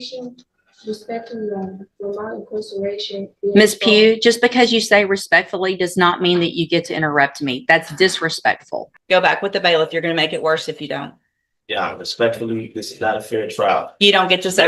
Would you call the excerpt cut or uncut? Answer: cut